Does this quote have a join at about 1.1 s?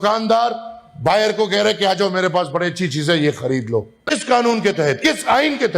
no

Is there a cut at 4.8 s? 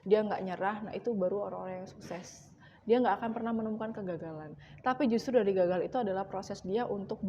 no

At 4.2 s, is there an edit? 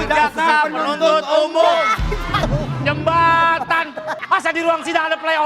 yes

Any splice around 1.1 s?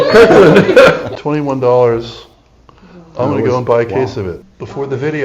yes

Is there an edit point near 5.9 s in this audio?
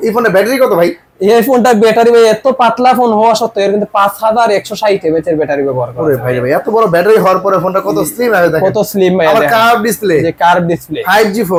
no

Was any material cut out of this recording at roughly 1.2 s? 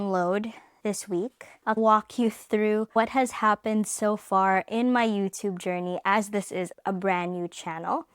yes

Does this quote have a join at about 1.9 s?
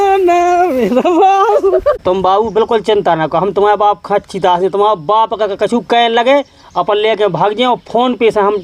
yes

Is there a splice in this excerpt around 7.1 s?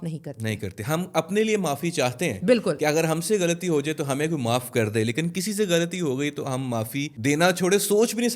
yes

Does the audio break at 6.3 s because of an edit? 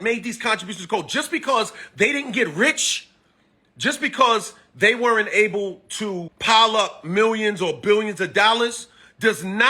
yes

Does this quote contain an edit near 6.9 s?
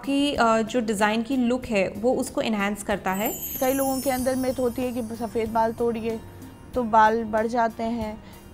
no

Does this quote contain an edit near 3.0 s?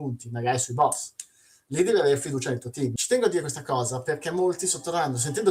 yes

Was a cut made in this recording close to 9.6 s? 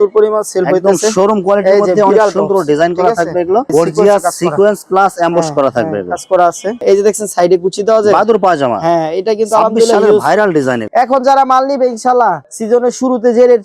no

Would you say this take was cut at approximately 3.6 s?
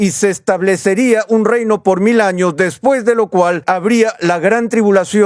yes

